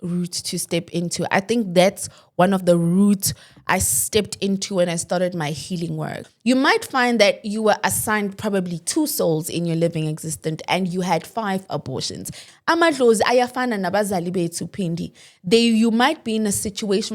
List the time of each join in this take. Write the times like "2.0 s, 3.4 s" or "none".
6.3 s, 12.5 s